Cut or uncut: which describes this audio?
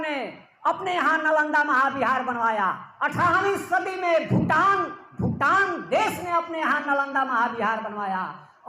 uncut